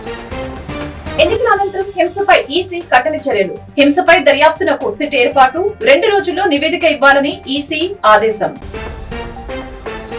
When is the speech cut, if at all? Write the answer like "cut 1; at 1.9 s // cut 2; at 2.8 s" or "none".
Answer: cut 1; at 1.2 s

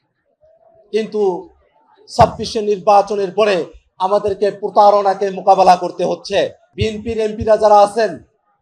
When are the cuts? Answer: cut 1; at 6.6 s

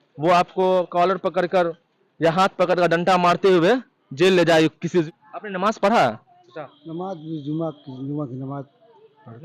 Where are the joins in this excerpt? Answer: cut 1; at 5.1 s

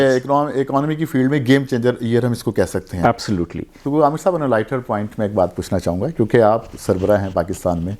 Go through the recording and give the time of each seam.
cut 1; at 3.8 s

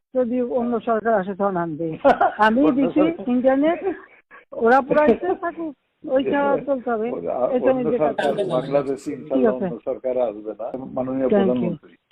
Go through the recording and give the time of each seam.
cut 1; at 10.8 s

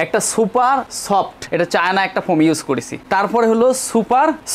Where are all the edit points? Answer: cut 1; at 1.4 s

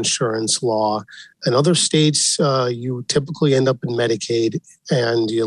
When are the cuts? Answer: none

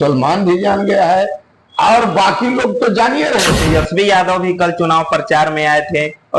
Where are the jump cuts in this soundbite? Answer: cut 1; at 3.6 s

